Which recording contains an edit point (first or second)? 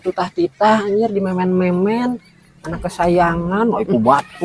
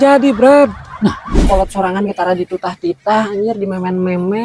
second